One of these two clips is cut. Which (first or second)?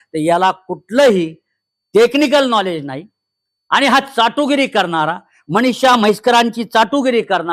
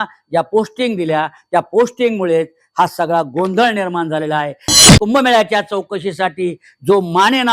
second